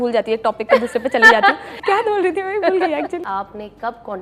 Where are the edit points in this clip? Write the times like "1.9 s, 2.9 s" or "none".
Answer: 1.7 s, 3.2 s

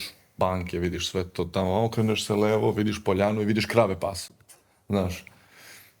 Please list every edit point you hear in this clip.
none

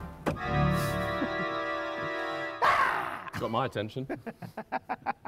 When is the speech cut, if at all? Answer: none

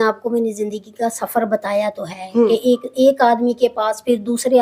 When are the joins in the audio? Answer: none

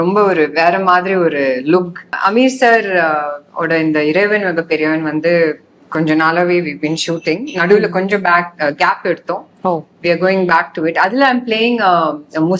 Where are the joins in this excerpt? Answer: 2.1 s

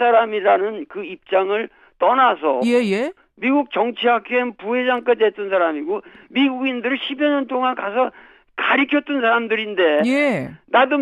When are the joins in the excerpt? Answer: 2.9 s

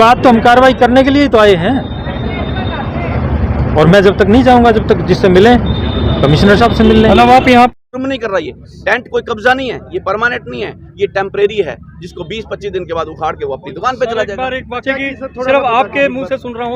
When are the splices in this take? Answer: 7.7 s, 14.8 s

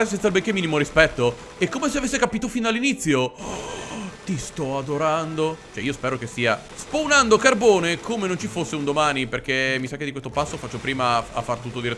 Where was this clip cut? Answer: none

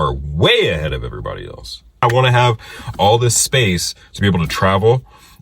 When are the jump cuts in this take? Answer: 2.0 s

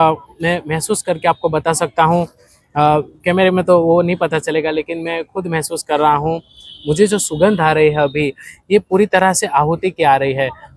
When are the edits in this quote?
none

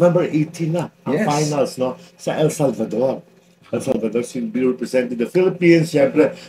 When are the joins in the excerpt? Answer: none

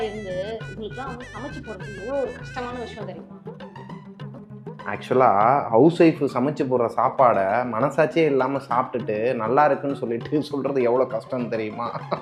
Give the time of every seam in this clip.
none

